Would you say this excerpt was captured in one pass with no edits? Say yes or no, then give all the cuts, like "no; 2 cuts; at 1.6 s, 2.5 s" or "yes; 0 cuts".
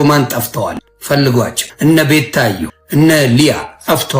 no; 3 cuts; at 0.9 s, 1.6 s, 2.7 s